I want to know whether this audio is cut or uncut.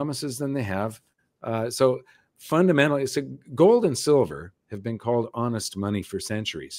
uncut